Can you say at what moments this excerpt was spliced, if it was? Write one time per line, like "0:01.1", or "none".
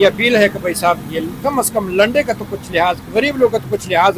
none